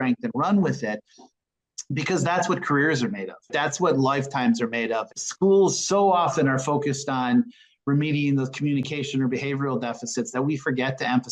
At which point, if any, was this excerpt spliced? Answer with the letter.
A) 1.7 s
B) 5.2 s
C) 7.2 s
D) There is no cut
B